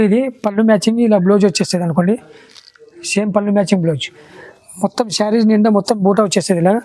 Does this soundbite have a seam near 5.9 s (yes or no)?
no